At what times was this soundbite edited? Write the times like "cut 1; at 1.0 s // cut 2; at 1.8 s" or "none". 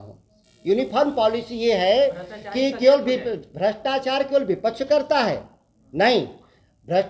none